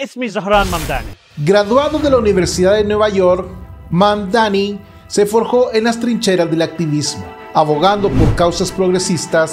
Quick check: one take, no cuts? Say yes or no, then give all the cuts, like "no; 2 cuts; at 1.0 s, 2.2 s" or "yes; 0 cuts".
no; 1 cut; at 1.1 s